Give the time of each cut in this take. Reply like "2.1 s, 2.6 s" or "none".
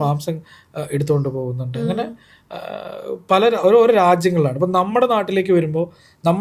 none